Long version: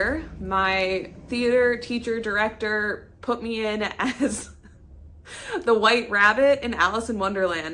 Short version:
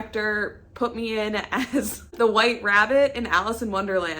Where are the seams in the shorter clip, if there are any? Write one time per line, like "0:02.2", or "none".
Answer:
0:02.1

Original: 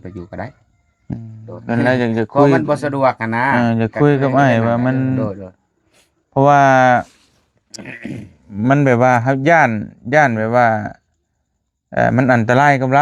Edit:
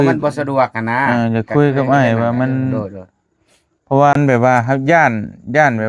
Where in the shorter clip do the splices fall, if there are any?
0:04.1

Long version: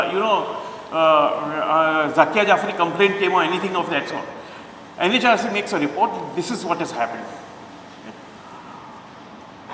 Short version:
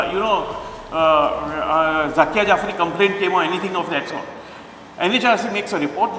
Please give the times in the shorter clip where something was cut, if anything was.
none

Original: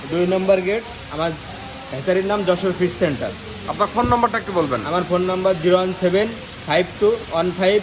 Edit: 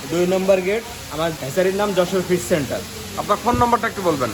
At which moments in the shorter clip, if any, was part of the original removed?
0:01.4

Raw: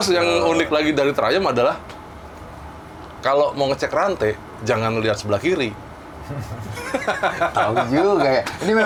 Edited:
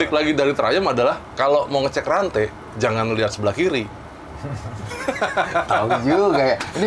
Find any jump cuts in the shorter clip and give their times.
0:01.3

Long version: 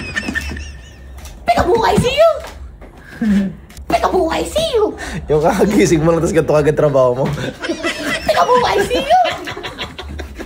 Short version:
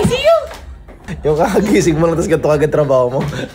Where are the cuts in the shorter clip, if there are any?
0:01.0

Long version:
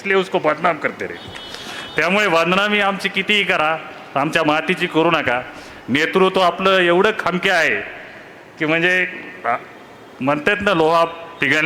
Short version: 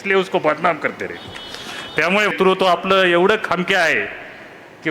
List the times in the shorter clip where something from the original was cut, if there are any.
0:02.3

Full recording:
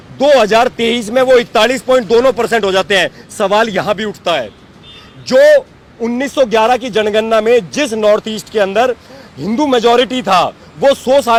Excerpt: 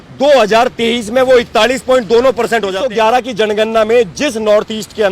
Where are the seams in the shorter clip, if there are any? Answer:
0:02.8

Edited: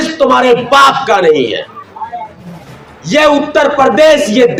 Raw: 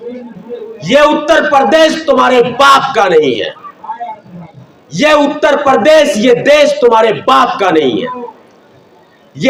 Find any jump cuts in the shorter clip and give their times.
none

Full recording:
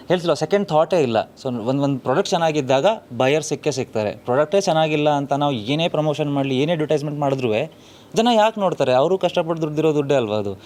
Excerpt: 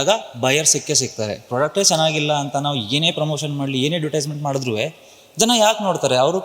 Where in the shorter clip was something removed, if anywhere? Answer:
none

